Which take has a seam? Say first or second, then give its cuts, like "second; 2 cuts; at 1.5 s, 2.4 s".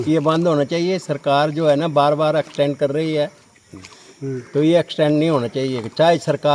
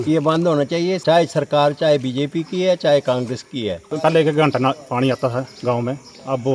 second; 2 cuts; at 1.0 s, 3.9 s